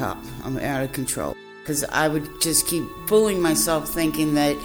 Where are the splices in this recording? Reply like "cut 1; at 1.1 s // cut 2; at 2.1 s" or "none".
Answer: cut 1; at 1.6 s // cut 2; at 3.0 s